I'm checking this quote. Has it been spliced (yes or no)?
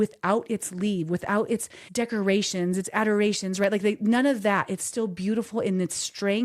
yes